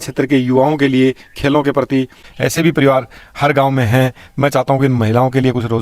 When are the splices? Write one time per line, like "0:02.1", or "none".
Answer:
0:02.3